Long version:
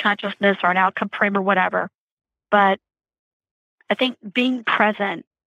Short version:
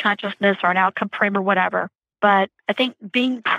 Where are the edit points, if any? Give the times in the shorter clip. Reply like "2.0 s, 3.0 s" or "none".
2.0 s, 2.6 s